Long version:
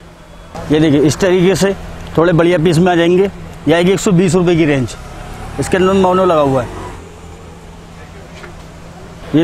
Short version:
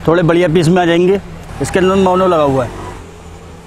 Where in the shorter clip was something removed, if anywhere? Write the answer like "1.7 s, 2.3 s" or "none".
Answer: 1.4 s